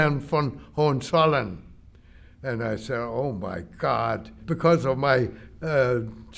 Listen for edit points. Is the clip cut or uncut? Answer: cut